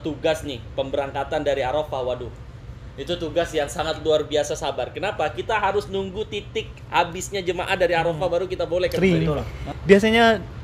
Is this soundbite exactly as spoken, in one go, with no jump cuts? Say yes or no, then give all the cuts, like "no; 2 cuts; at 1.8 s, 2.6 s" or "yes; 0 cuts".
no; 1 cut; at 8.9 s